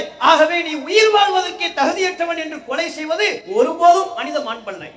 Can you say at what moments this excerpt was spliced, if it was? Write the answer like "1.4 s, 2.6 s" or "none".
3.4 s